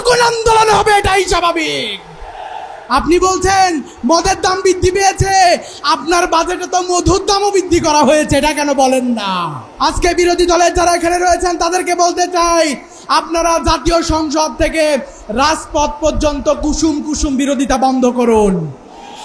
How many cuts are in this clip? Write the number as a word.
one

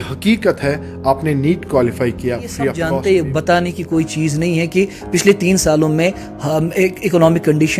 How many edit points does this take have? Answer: one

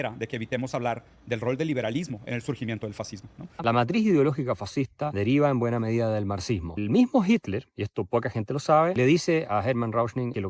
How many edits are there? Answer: one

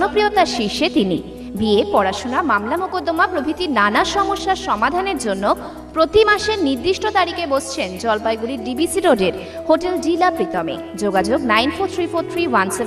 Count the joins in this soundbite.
zero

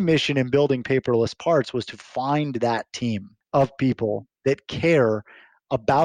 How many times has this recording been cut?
one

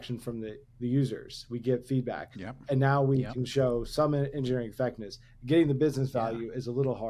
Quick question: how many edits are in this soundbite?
zero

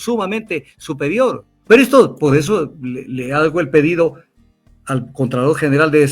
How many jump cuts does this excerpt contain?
one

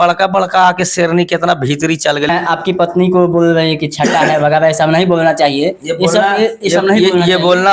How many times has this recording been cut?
one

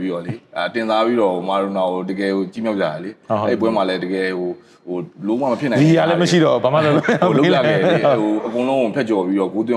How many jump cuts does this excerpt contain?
zero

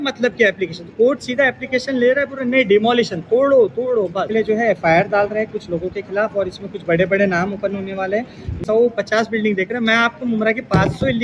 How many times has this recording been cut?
two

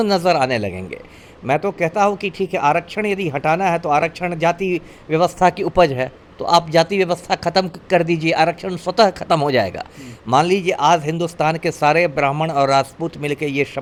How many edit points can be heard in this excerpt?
zero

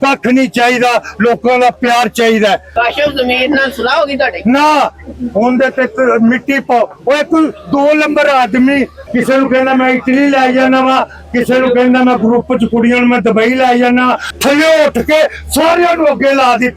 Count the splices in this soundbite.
three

